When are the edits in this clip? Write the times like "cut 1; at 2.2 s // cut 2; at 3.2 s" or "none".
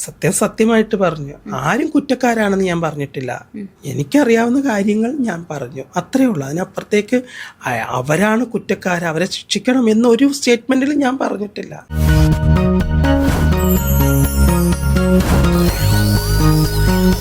none